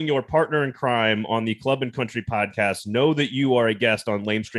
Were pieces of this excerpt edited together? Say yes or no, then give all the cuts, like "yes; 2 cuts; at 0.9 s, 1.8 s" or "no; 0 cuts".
no; 0 cuts